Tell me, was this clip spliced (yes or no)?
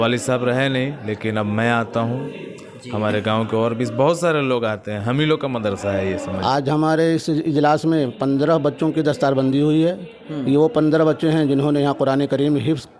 yes